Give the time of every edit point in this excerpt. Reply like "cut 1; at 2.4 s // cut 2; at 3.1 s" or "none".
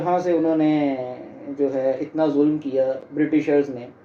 none